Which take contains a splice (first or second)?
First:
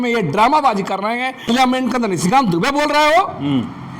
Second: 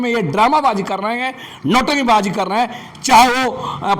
first